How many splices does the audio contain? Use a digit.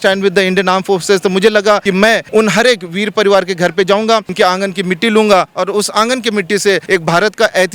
3